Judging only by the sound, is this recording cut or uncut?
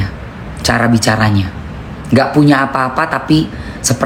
uncut